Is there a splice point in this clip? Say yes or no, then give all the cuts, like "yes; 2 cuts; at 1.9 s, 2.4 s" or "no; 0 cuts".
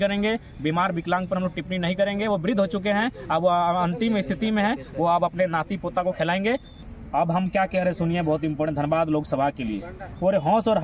yes; 1 cut; at 6.7 s